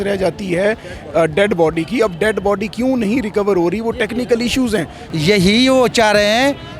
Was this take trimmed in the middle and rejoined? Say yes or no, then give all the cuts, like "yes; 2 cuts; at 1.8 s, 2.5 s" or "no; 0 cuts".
yes; 1 cut; at 5.1 s